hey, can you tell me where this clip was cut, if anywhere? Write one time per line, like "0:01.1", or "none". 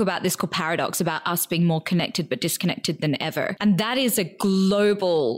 0:03.5